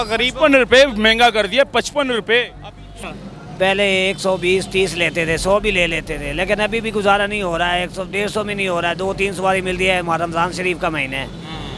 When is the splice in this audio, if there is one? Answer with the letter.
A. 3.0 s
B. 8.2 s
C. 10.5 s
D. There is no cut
A